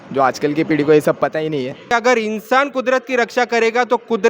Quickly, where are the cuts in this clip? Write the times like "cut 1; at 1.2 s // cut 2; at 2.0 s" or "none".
cut 1; at 1.9 s